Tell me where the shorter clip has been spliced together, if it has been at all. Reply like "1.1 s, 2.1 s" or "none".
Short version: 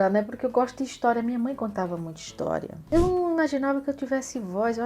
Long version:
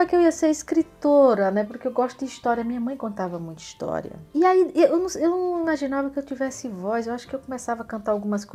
2.8 s